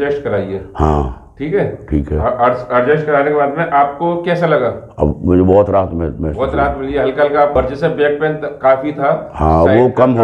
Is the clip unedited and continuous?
no; 1 cut; at 7.5 s

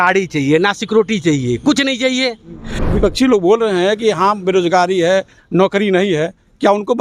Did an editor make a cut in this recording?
yes; 1 cut; at 2.8 s

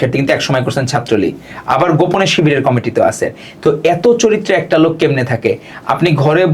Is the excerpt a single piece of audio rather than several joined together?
yes; 0 cuts

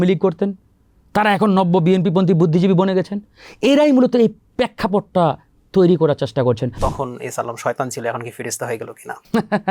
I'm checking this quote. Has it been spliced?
yes; 1 cut; at 6.7 s

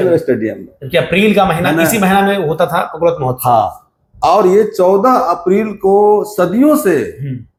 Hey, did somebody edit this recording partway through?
no; 0 cuts

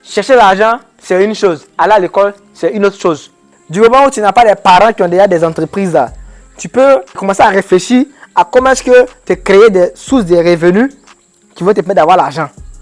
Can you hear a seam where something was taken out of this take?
yes; 2 cuts; at 3.4 s, 7.1 s

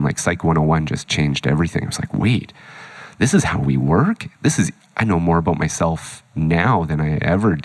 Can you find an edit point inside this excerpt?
no; 0 cuts

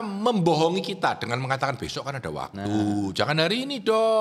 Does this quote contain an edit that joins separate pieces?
no; 0 cuts

